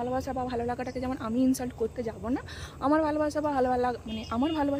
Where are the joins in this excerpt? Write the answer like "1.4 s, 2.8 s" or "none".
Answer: none